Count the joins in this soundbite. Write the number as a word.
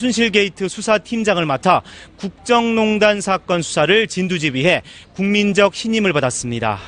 one